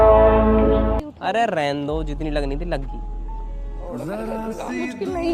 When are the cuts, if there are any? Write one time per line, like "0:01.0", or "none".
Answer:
0:01.1